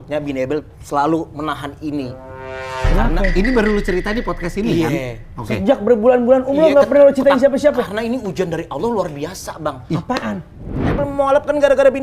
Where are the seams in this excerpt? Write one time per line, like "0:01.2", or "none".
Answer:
0:10.8